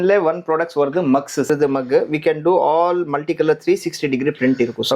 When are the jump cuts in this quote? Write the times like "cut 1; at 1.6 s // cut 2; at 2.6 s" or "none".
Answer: cut 1; at 1.5 s